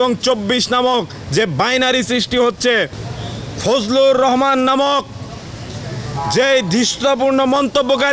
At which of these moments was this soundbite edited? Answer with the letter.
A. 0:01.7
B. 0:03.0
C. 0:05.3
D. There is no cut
B